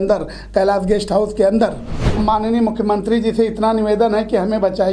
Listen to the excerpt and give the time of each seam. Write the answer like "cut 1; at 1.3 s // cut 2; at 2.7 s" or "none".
cut 1; at 2.2 s